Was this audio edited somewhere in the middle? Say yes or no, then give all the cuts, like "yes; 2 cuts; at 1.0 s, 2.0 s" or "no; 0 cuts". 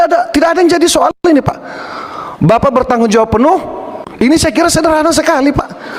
yes; 1 cut; at 4.0 s